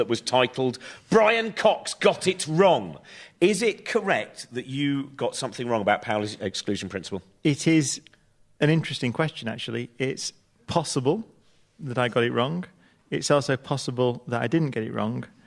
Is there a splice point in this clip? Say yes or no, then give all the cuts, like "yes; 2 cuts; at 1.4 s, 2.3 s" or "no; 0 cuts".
no; 0 cuts